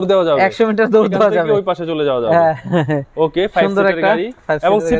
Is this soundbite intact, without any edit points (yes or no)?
yes